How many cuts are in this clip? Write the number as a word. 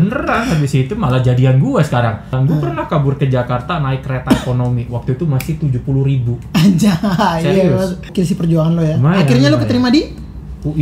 two